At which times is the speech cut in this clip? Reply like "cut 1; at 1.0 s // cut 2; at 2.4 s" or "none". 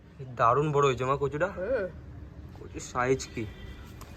none